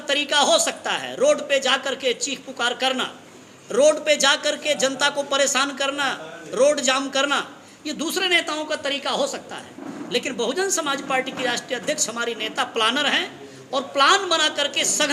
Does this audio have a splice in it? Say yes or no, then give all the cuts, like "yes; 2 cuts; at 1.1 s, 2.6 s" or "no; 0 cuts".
no; 0 cuts